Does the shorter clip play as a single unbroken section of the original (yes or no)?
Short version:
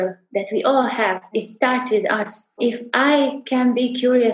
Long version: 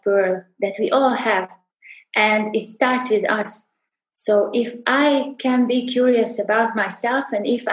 no